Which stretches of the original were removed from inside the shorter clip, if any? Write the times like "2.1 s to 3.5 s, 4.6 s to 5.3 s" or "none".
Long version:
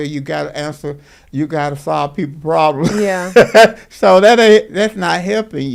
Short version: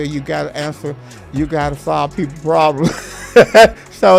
none